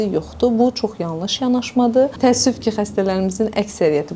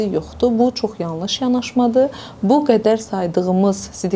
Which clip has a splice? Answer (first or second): first